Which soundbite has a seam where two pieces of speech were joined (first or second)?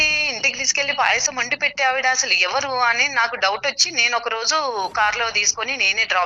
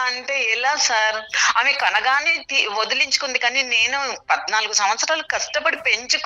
second